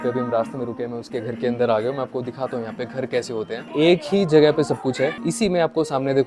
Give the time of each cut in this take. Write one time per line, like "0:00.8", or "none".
0:03.7
0:05.2